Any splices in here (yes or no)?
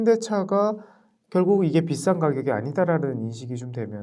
no